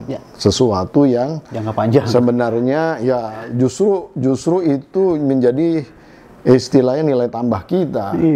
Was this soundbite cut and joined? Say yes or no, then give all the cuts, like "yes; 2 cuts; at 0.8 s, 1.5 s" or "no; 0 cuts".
no; 0 cuts